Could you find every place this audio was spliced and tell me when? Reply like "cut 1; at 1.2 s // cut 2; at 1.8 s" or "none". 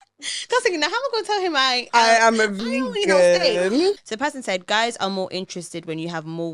cut 1; at 4.0 s

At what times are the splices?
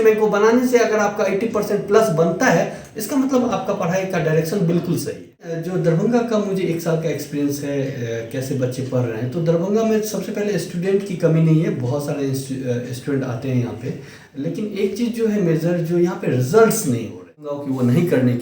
cut 1; at 5.5 s // cut 2; at 17.4 s

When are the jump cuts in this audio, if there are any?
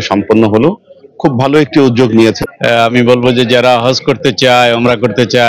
cut 1; at 2.4 s

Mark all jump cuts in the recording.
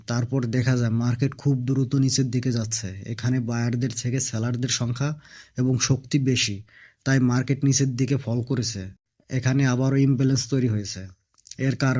none

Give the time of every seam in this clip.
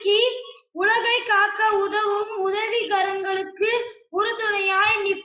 none

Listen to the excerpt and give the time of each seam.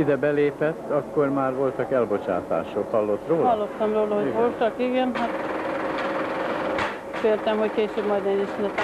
none

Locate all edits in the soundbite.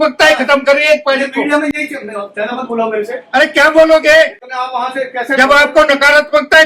none

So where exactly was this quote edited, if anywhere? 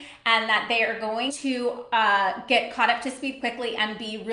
cut 1; at 1.3 s

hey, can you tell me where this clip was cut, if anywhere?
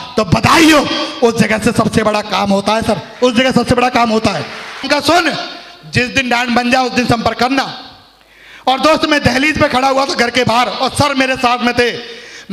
cut 1; at 4.9 s

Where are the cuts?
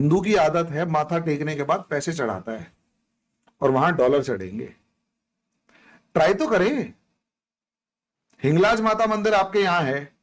none

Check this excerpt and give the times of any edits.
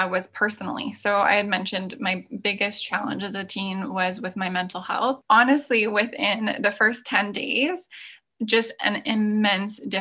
cut 1; at 5.2 s

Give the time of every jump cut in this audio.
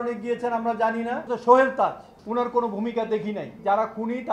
cut 1; at 1.3 s // cut 2; at 2.1 s // cut 3; at 3.6 s

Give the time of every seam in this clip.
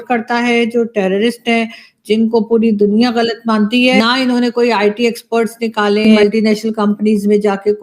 cut 1; at 4.0 s // cut 2; at 6.1 s

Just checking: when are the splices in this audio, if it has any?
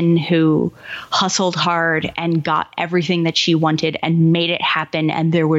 none

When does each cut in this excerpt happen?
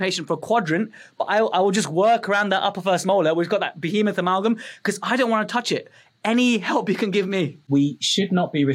cut 1; at 7.7 s

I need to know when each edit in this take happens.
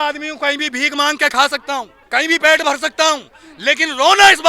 cut 1; at 2.0 s

